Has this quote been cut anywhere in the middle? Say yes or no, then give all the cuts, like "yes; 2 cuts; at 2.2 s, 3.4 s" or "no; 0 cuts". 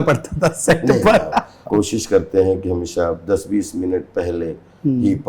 yes; 1 cut; at 1.6 s